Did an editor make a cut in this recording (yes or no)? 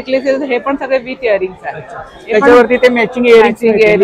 no